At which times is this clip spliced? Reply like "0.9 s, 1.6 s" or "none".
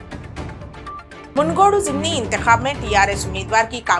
1.2 s